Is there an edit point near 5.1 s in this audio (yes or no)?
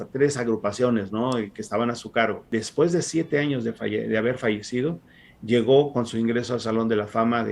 no